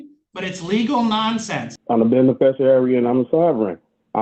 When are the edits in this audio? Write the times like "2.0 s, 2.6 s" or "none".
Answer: 1.7 s